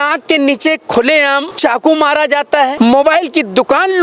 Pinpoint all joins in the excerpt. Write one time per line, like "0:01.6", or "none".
0:01.5
0:02.7